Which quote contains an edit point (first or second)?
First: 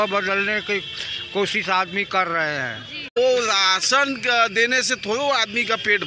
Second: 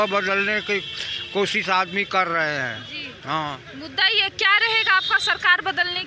first